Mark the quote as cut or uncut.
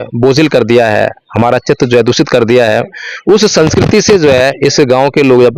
uncut